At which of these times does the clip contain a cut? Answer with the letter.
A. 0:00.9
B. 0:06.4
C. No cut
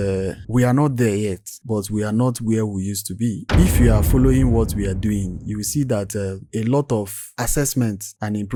C